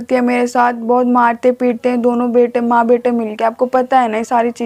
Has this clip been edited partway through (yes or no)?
no